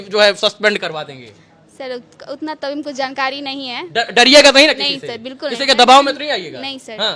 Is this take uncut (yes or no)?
yes